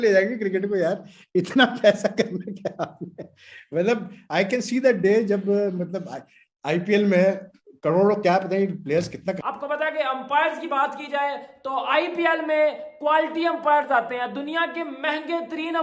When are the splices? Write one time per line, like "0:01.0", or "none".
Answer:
0:09.4